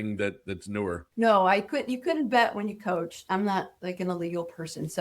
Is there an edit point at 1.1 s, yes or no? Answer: no